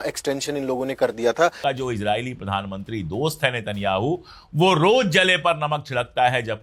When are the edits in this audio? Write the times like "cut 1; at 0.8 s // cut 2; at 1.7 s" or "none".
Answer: cut 1; at 1.6 s